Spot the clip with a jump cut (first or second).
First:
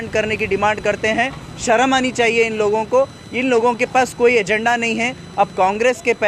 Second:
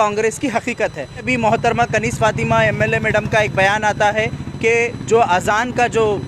second